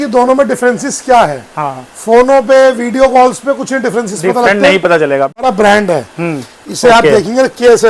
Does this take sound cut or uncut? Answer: cut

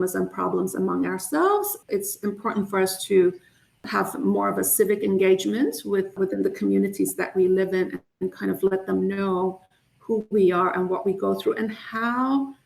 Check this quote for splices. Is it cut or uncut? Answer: cut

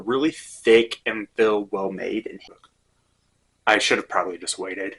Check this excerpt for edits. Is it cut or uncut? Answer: cut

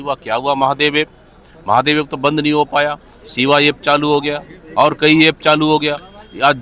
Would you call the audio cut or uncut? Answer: uncut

